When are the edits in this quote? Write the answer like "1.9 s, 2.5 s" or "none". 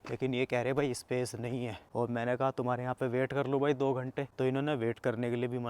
1.8 s, 4.2 s